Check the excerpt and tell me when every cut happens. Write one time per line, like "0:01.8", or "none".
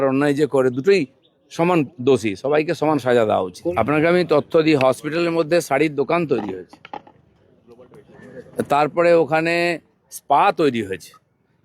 0:03.6